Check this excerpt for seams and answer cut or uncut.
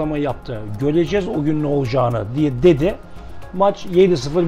uncut